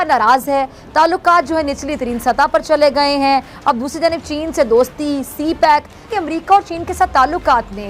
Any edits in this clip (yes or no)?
yes